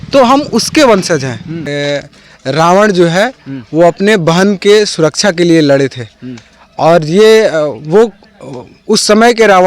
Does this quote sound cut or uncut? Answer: cut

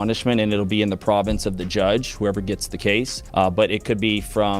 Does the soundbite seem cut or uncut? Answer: cut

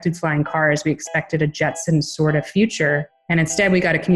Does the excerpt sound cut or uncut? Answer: cut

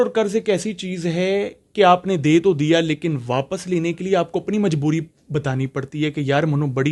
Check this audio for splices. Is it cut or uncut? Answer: uncut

